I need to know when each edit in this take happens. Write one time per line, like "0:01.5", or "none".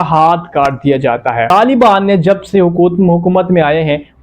0:01.5